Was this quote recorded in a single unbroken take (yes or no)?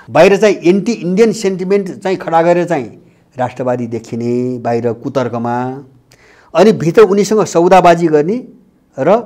yes